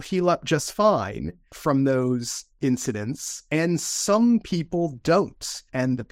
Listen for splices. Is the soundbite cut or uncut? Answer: cut